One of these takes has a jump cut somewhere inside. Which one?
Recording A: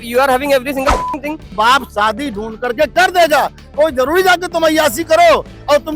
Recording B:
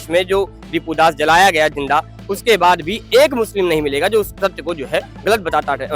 A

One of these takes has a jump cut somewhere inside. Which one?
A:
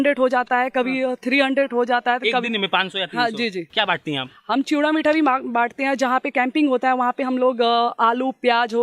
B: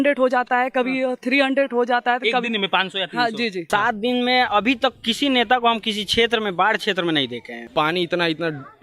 B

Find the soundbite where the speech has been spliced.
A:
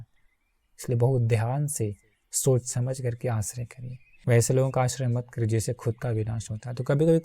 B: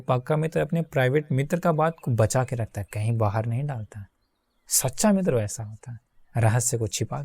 A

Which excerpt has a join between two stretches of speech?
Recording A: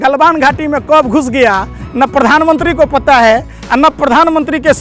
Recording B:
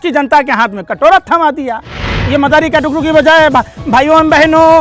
B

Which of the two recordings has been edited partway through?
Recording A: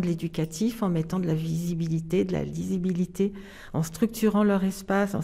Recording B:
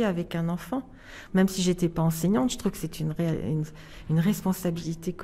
B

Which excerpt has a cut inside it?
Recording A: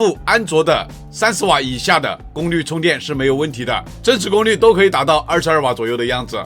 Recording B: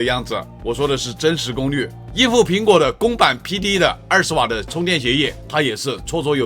B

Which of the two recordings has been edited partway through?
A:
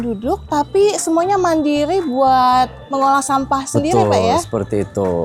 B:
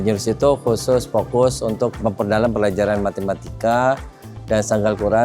B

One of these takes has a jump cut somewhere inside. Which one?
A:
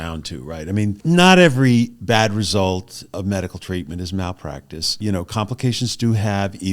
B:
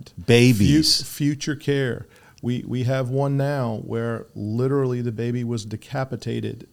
A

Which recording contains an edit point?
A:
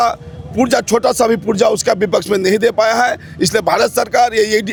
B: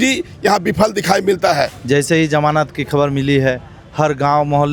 B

